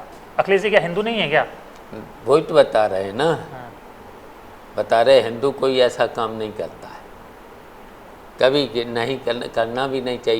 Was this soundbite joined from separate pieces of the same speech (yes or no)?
no